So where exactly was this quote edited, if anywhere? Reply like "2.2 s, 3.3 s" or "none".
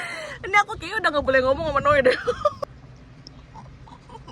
2.6 s